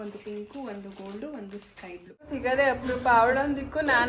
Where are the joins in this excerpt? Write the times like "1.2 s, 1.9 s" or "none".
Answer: 2.3 s